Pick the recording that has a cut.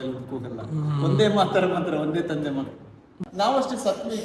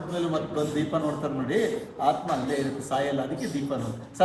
first; 1 cut; at 3.2 s

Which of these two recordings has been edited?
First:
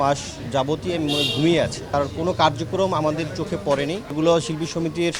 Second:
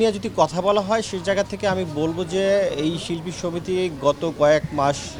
first; 2 cuts; at 1.9 s, 4.1 s

